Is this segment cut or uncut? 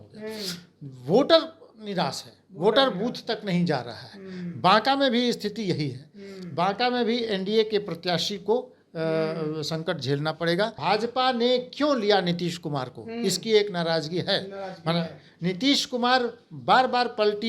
cut